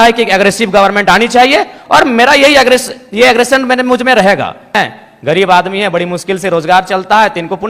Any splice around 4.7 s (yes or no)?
yes